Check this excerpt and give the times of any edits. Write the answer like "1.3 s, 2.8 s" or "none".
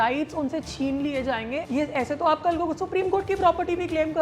1.6 s